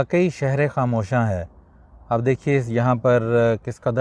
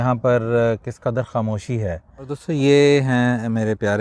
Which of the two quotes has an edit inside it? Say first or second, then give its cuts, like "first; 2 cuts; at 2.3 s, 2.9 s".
second; 1 cut; at 2.4 s